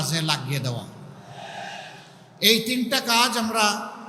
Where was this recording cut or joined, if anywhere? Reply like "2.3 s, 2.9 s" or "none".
none